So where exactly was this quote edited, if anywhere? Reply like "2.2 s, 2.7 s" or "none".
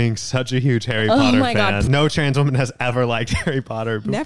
1.8 s